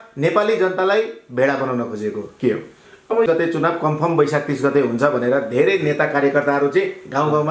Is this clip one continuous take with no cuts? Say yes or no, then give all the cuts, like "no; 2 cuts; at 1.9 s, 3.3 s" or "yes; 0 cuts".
no; 1 cut; at 3.3 s